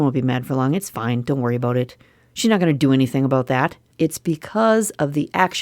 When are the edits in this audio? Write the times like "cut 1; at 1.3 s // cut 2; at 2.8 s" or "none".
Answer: cut 1; at 3.8 s